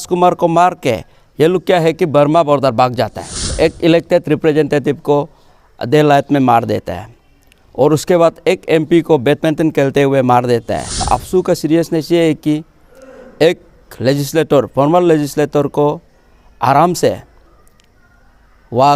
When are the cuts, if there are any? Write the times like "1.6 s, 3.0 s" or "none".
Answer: 3.5 s, 11.1 s